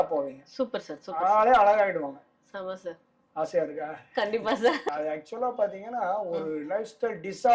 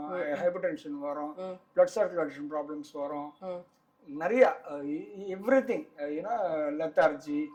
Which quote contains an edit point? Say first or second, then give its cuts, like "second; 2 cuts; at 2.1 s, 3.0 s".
first; 1 cut; at 4.8 s